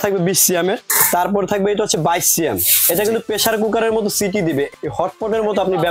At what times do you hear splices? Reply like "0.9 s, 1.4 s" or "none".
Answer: 0.8 s, 4.7 s